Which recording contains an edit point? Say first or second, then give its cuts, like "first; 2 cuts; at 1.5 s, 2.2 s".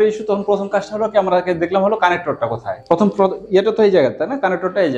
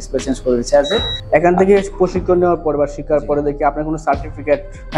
second; 1 cut; at 1.2 s